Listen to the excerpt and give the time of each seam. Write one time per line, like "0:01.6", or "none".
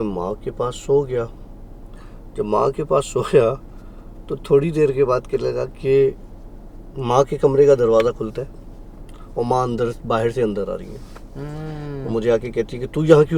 none